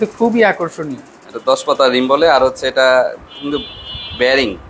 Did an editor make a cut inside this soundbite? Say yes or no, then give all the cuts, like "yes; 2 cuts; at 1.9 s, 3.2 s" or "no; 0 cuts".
no; 0 cuts